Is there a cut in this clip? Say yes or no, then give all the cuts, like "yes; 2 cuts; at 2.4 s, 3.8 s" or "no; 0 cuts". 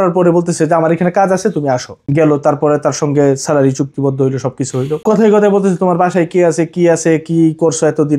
yes; 2 cuts; at 2.0 s, 5.0 s